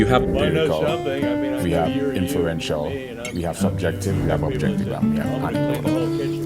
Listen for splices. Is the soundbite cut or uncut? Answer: cut